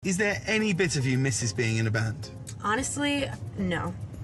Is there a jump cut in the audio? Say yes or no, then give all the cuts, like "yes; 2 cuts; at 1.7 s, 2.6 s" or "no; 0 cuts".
no; 0 cuts